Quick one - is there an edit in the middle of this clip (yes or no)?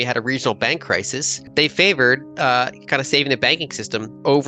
yes